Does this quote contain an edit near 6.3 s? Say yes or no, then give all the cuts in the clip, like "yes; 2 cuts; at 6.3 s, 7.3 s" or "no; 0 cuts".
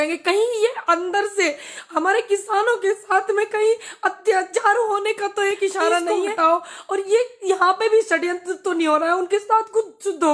yes; 1 cut; at 6.3 s